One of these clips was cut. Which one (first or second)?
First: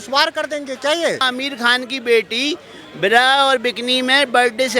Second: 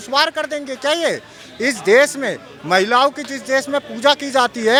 first